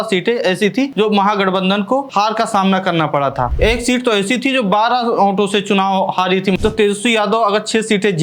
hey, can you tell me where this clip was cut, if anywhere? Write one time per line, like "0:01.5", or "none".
0:00.9
0:02.1
0:03.5
0:06.6